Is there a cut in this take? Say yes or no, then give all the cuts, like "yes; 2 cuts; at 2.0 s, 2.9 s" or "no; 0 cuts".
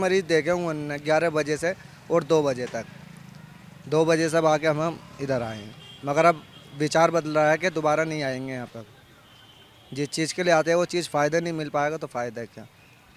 no; 0 cuts